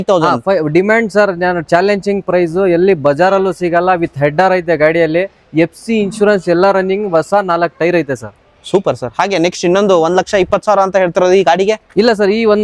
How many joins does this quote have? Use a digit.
0